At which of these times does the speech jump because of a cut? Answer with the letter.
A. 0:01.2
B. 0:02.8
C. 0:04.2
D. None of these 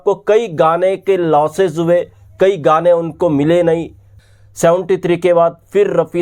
C